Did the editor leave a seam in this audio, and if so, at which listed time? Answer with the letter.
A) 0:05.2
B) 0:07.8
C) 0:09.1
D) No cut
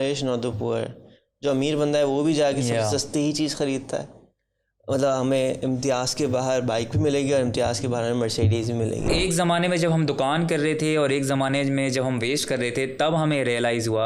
C